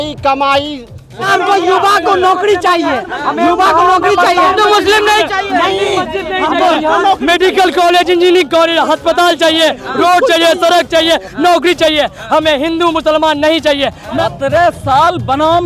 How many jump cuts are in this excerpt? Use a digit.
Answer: 2